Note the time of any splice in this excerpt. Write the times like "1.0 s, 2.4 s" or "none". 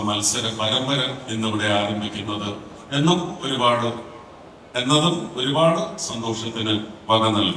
none